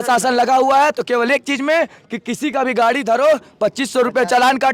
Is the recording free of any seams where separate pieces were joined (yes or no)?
yes